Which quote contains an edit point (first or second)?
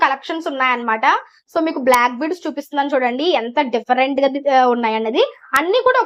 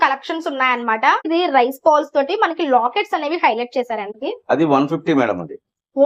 second